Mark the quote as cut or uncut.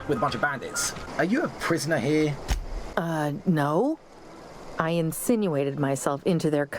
cut